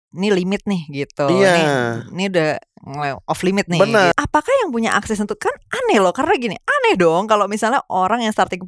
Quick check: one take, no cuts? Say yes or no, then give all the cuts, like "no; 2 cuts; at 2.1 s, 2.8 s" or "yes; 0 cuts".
no; 1 cut; at 4.1 s